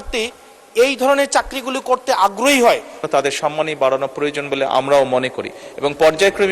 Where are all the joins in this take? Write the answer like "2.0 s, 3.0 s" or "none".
2.9 s